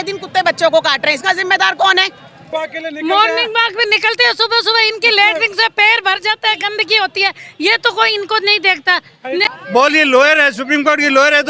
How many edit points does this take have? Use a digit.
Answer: 2